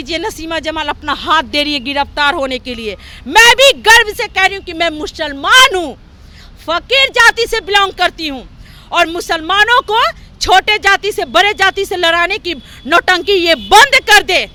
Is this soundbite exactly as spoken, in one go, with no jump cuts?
yes; 0 cuts

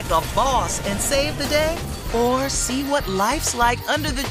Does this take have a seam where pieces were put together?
no; 0 cuts

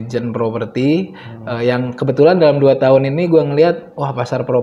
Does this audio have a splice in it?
no; 0 cuts

